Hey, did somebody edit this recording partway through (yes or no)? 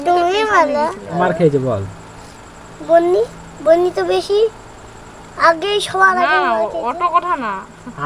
yes